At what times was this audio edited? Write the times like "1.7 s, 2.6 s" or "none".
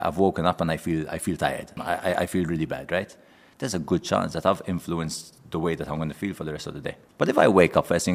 1.7 s, 7.0 s